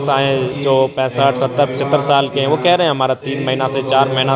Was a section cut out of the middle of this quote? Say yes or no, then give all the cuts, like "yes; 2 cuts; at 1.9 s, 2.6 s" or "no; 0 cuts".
no; 0 cuts